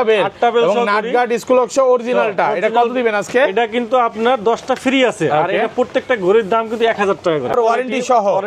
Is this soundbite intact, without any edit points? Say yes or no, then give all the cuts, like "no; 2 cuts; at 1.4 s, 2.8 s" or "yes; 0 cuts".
no; 1 cut; at 7.5 s